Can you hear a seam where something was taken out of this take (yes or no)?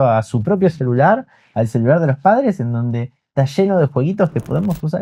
no